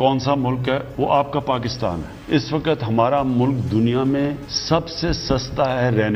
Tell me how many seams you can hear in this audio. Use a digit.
0